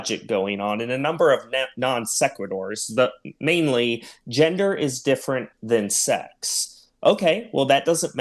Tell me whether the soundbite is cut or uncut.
uncut